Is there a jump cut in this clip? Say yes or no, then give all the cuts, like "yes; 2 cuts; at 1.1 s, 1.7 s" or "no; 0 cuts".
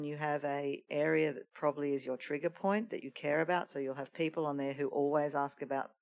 no; 0 cuts